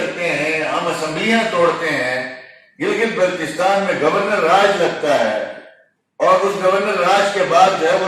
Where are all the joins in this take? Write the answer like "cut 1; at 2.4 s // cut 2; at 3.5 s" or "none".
none